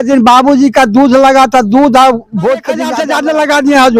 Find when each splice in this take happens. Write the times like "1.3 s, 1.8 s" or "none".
2.9 s